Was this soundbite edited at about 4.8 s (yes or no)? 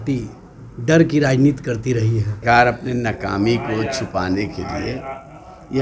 no